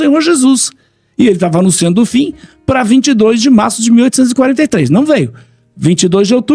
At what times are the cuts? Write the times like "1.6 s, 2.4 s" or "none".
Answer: none